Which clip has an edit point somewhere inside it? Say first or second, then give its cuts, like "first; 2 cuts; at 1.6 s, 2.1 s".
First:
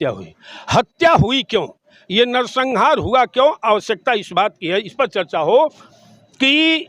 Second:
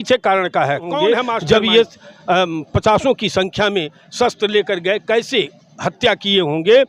second; 1 cut; at 1.0 s